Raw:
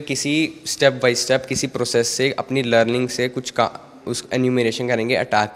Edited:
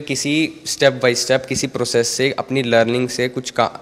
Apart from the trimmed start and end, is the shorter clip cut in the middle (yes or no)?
no